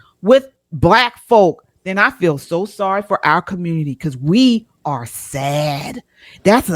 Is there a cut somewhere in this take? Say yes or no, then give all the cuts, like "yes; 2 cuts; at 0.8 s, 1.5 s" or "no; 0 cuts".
no; 0 cuts